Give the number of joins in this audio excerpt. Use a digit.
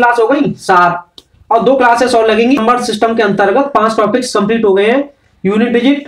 1